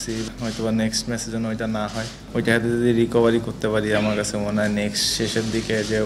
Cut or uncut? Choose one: cut